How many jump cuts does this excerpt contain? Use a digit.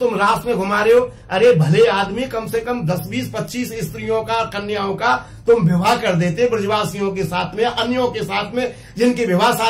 0